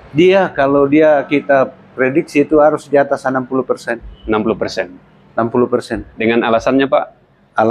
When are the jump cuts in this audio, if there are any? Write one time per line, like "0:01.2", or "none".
0:06.0